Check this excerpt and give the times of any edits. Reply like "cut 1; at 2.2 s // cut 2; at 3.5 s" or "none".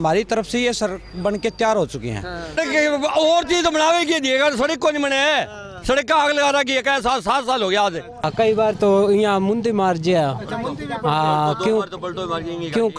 cut 1; at 2.6 s // cut 2; at 8.3 s